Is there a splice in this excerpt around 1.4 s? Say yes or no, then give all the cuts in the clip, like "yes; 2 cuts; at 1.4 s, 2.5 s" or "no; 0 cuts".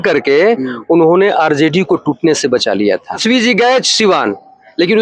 no; 1 cut; at 3.2 s